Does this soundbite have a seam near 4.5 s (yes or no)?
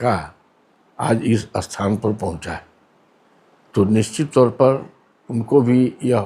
no